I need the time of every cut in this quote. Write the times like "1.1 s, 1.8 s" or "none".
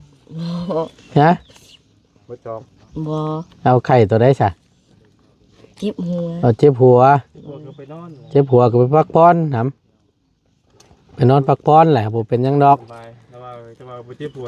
none